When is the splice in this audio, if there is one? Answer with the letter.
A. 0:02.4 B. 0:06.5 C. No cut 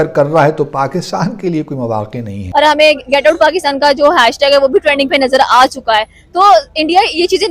A